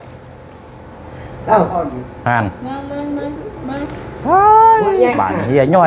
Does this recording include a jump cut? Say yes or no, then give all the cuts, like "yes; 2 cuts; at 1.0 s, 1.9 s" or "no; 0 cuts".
no; 0 cuts